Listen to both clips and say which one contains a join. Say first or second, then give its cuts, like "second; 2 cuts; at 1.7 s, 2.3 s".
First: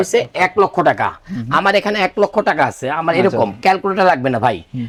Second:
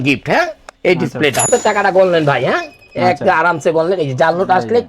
second; 1 cut; at 1.5 s